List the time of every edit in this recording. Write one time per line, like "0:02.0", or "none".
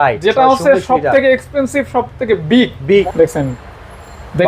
0:03.1